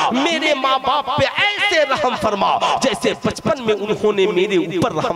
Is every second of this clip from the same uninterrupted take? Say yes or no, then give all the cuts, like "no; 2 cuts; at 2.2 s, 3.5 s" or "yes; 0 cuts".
yes; 0 cuts